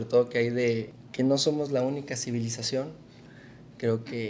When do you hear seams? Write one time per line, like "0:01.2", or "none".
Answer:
0:01.0